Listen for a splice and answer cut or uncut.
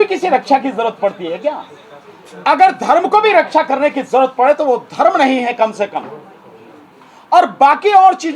uncut